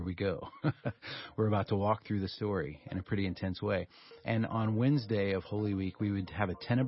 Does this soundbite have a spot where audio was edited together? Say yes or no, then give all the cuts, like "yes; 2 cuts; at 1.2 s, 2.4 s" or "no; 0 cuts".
no; 0 cuts